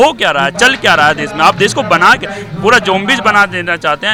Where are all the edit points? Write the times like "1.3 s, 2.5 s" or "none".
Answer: none